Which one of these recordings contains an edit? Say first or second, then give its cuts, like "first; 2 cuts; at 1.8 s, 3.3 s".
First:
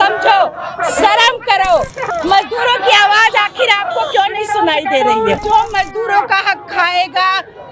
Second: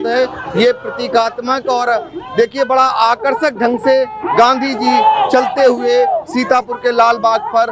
first; 2 cuts; at 2.1 s, 5.4 s